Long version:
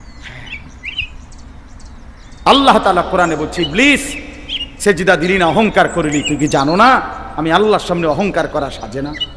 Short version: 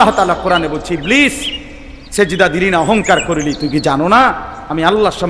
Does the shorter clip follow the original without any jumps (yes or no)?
yes